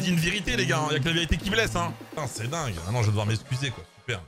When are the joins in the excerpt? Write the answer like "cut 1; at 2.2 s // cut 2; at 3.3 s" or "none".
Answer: cut 1; at 2.0 s